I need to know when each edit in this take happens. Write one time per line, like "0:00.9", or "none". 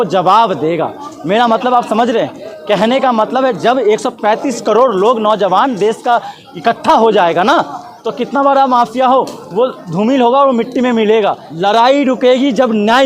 0:11.5